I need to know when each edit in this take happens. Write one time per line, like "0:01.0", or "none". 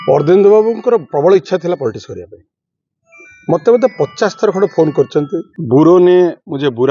0:05.4